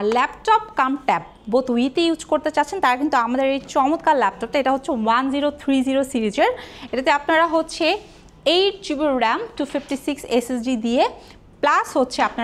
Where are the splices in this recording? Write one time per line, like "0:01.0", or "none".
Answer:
none

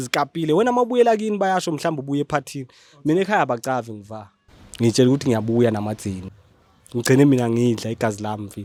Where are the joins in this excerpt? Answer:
none

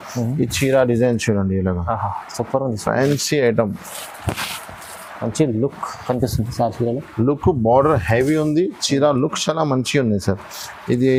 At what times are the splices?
none

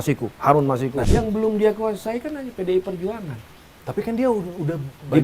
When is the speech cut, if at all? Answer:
0:01.0

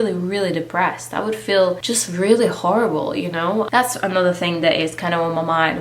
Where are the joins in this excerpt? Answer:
0:03.7

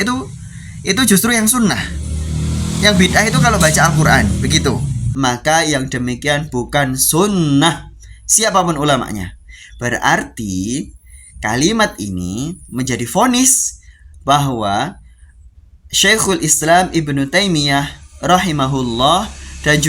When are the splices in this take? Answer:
0:05.1

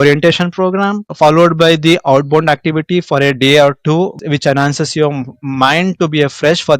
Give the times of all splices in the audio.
0:04.2

